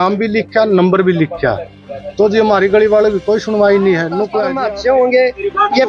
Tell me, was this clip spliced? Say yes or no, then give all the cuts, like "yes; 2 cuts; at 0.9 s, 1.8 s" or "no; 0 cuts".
yes; 1 cut; at 4.4 s